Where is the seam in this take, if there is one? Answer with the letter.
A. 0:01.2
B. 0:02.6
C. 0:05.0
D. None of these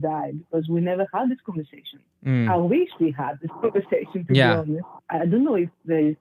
C